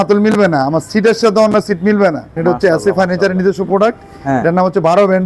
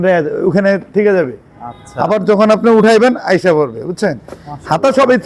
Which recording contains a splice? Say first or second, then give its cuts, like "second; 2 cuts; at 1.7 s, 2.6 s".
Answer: first; 1 cut; at 2.3 s